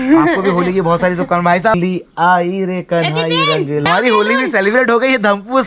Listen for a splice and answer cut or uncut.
cut